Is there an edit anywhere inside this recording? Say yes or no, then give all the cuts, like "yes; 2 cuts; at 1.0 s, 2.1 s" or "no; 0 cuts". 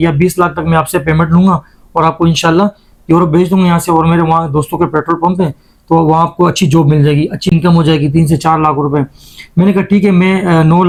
no; 0 cuts